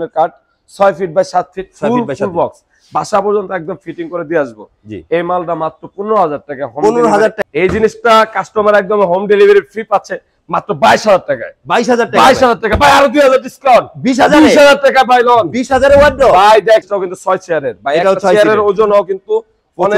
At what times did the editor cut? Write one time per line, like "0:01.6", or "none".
0:07.4
0:16.8